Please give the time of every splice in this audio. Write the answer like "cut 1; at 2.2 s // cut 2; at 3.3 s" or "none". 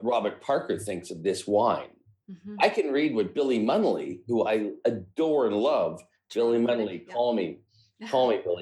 none